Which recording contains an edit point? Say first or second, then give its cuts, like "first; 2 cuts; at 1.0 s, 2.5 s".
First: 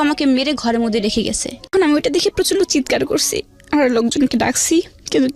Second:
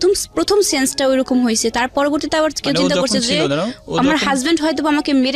first; 1 cut; at 1.7 s